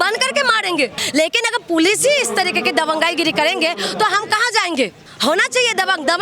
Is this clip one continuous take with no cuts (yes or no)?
no